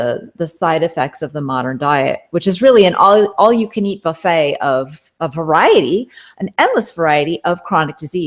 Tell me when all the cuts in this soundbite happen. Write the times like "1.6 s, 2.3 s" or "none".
none